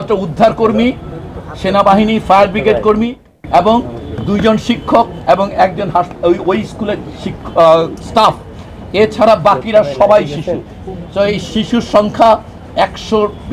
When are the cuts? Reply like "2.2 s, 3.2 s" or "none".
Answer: none